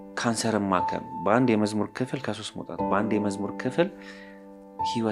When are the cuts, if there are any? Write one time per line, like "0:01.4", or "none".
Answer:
none

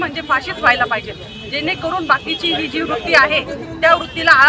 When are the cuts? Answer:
none

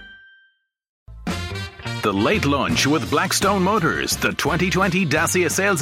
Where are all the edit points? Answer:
0:01.0

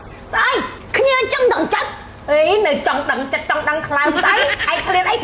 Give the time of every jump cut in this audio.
none

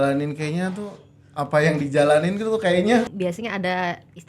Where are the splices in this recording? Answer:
0:03.1

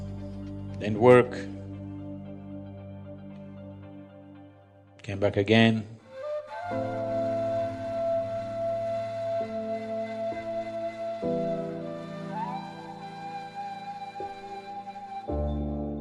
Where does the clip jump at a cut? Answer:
none

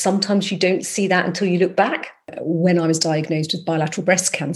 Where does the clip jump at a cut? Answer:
0:02.3

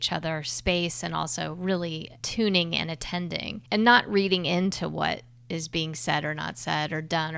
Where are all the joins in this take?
0:02.2
0:03.5

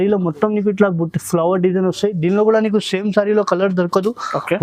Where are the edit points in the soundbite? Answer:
none

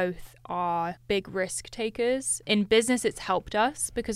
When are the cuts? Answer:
0:01.0
0:02.4

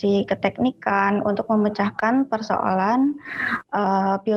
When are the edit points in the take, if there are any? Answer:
none

